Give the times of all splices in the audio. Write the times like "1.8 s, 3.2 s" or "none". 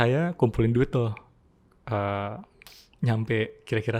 none